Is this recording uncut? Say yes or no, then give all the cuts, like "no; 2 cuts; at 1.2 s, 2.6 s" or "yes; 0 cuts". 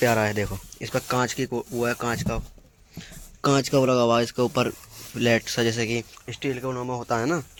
yes; 0 cuts